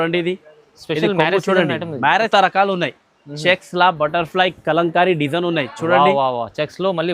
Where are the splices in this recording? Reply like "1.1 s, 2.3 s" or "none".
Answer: 2.3 s